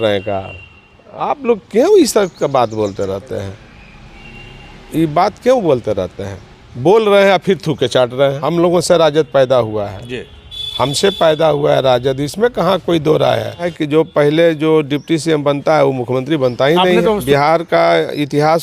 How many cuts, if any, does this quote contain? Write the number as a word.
three